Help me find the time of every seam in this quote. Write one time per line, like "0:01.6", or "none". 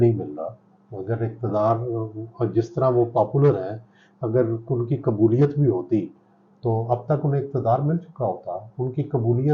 none